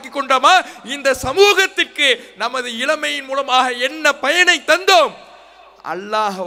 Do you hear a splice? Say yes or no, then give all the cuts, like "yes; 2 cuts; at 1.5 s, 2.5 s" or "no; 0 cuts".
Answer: no; 0 cuts